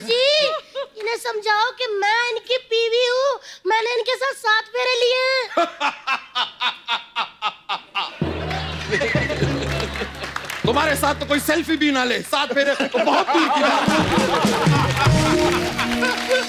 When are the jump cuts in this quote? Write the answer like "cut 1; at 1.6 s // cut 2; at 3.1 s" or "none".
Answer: none